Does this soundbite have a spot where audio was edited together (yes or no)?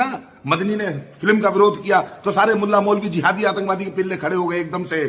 no